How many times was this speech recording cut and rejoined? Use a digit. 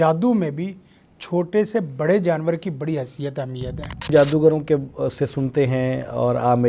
1